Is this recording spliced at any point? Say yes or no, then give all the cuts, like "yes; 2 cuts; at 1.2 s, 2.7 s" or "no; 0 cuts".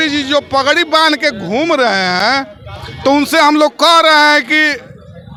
no; 0 cuts